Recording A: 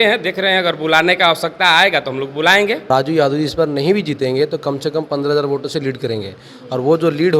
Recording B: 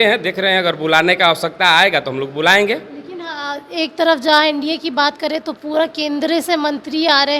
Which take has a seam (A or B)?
A